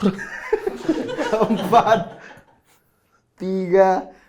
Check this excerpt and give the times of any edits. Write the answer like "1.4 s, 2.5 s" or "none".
none